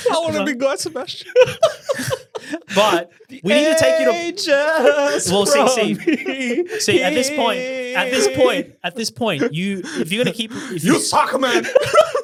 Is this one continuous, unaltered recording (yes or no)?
yes